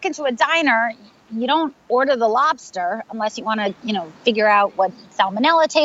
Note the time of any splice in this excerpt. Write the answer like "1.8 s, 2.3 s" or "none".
none